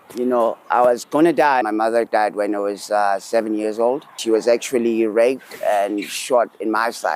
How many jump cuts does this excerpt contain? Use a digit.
2